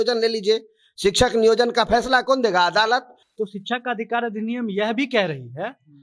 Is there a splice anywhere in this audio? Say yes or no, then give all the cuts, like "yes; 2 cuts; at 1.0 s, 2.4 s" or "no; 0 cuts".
yes; 1 cut; at 3.2 s